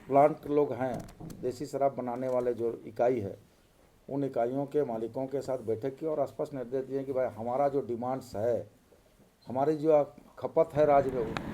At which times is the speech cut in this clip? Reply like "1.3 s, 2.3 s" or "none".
none